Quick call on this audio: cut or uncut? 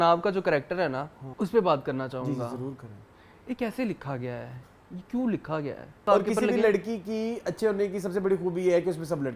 cut